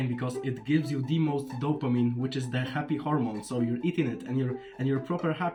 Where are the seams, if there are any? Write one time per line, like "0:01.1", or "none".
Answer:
none

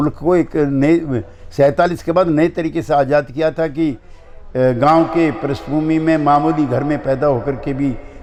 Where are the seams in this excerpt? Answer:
none

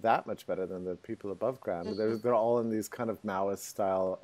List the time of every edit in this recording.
0:02.5

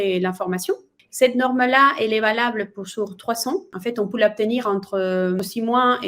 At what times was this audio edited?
0:03.7
0:05.4

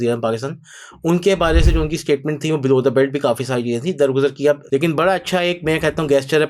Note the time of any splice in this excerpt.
0:04.6

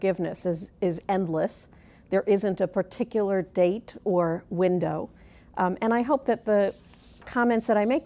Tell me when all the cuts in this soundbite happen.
0:04.1

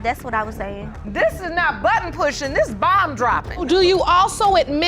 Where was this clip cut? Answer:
0:03.6

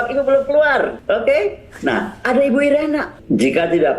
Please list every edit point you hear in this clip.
0:01.0
0:03.1

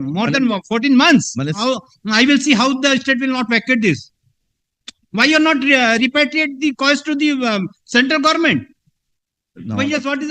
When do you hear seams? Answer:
0:01.5

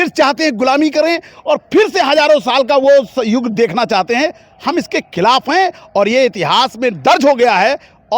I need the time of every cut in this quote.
none

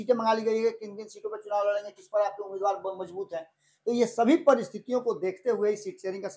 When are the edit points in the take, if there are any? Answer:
none

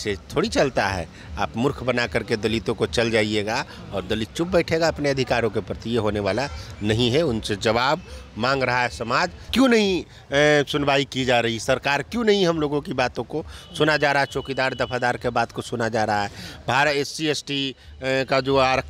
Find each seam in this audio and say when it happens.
0:09.5

